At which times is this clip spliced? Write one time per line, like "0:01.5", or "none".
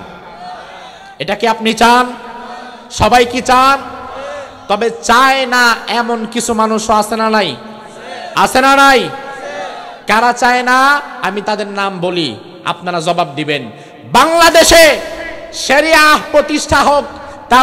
none